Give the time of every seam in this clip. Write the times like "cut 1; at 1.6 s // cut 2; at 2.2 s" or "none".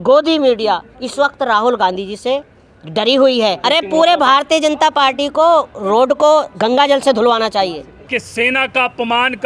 cut 1; at 3.6 s // cut 2; at 8.0 s